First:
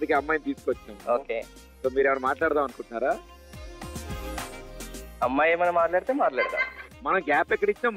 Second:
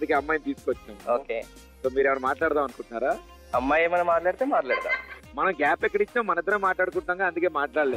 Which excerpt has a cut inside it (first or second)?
second